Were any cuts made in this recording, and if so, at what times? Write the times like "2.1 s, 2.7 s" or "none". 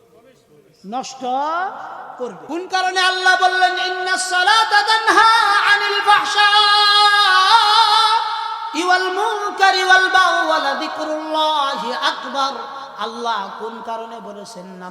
2.4 s